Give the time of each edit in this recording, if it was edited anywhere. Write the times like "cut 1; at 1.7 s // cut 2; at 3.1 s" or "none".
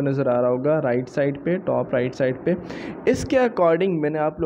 none